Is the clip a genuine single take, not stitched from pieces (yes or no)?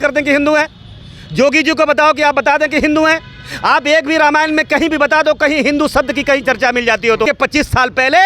no